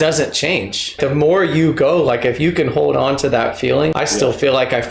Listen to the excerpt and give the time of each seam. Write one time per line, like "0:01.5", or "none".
0:01.0
0:03.9